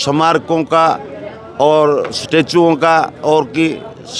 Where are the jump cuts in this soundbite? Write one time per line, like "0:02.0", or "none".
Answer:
none